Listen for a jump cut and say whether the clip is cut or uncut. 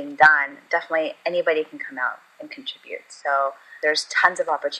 cut